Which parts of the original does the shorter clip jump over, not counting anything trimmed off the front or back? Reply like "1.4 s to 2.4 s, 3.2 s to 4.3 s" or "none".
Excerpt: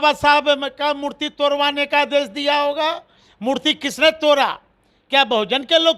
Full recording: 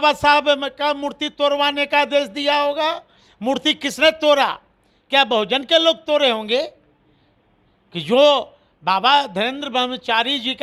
none